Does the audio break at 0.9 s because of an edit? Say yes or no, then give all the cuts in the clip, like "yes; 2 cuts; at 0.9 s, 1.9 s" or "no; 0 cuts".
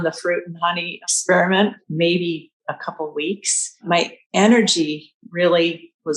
yes; 2 cuts; at 0.9 s, 1.8 s